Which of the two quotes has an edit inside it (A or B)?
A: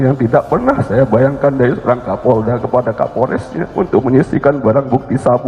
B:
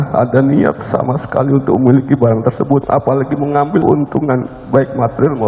B